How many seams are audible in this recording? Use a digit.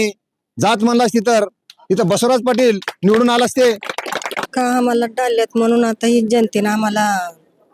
1